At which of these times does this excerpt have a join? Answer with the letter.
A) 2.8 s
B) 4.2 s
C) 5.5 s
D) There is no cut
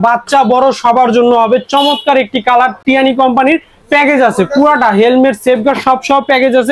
D